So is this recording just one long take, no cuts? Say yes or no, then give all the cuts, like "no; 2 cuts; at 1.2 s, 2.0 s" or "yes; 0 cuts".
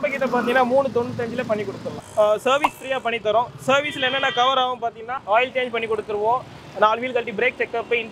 no; 2 cuts; at 1.8 s, 5.1 s